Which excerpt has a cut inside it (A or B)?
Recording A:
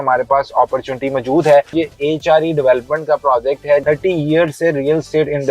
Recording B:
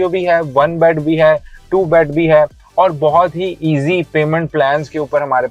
A